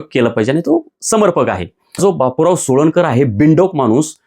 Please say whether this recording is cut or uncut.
cut